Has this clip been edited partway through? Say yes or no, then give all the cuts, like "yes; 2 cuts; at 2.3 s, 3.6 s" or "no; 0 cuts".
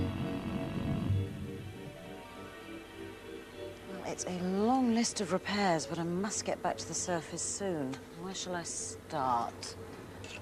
yes; 1 cut; at 2.6 s